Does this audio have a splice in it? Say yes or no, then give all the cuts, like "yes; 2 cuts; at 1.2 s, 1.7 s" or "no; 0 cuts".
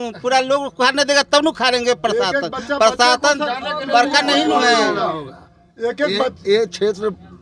no; 0 cuts